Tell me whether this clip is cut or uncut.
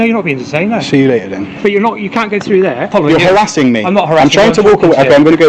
cut